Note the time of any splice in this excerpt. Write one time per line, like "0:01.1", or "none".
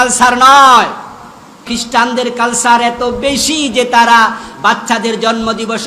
0:01.6

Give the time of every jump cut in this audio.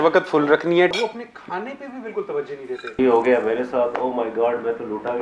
0:00.9
0:02.9

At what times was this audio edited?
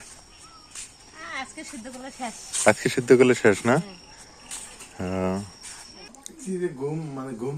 0:06.3

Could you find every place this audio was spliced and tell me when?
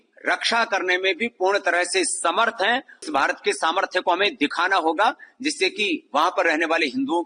0:03.1

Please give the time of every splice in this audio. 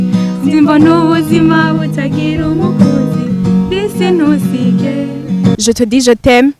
0:05.5

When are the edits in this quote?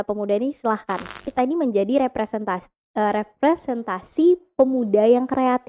0:01.3

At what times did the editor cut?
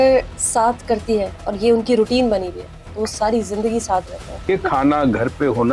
0:01.4
0:04.5

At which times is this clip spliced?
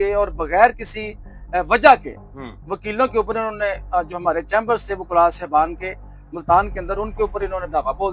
none

